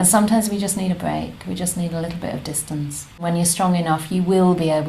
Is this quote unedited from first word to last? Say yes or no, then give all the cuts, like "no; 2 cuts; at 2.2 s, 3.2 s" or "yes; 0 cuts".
no; 1 cut; at 3.2 s